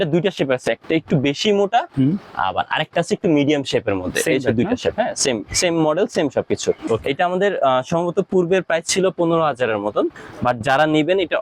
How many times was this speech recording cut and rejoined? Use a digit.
2